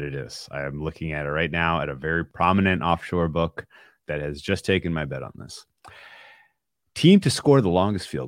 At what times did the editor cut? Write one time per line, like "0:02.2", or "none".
0:02.3
0:03.9